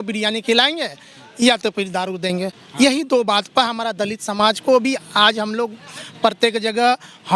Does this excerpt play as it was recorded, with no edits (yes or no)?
yes